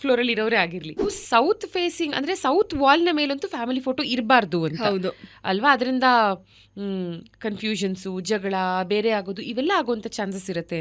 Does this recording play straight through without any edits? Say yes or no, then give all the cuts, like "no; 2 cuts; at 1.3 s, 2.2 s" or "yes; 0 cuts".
no; 1 cut; at 0.9 s